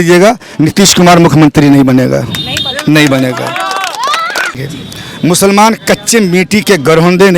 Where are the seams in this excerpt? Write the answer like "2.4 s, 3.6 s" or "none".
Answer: 4.6 s